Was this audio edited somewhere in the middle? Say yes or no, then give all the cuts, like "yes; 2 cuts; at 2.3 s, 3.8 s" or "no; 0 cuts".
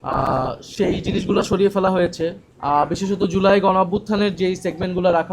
yes; 1 cut; at 2.5 s